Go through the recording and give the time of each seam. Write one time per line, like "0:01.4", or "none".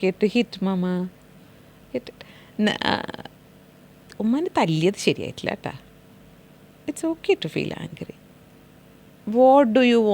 none

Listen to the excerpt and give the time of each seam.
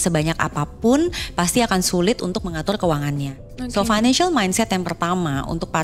none

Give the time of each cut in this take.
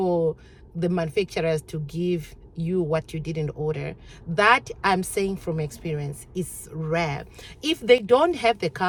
none

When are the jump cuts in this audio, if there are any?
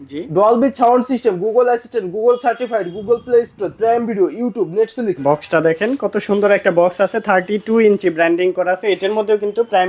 0:05.2

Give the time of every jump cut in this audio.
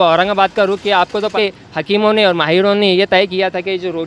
0:01.3

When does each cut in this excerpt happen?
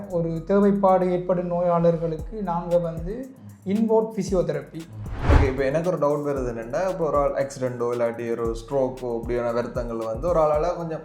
0:05.1

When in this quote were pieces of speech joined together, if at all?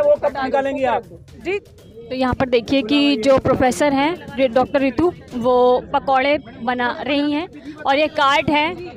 0:01.7

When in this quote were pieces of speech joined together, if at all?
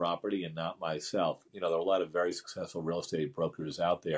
0:01.5

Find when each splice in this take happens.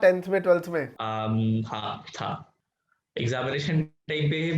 0:00.9
0:02.5

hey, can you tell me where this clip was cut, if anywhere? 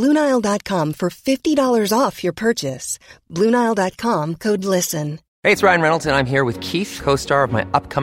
0:05.2

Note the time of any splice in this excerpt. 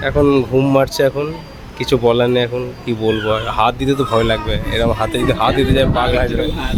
none

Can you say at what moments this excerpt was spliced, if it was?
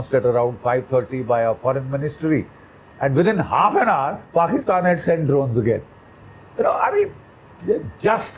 none

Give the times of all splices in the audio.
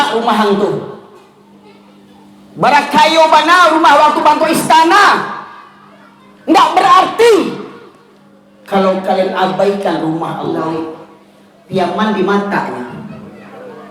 0:10.5

